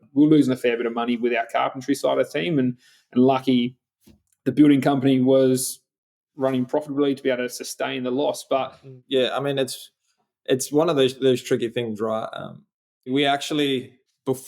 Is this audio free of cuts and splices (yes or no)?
yes